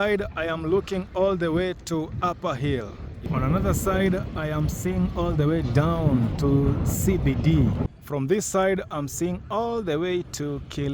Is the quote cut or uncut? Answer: cut